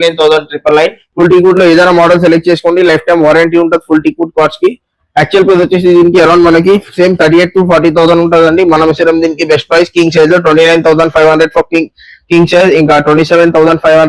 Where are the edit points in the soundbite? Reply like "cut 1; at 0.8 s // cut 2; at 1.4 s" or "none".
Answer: cut 1; at 1.0 s